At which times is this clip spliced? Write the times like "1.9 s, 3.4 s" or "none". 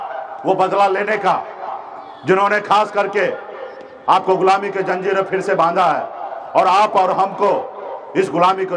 none